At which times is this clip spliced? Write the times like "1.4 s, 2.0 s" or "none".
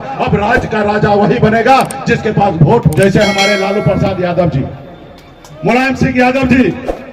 2.9 s